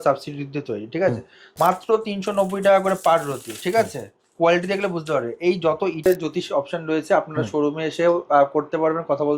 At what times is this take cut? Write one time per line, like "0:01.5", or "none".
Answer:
0:01.5
0:06.1